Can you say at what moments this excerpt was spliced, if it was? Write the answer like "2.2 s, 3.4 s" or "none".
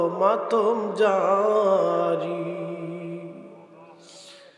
none